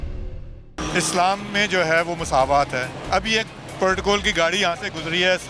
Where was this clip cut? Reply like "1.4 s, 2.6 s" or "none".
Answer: 0.8 s, 2.9 s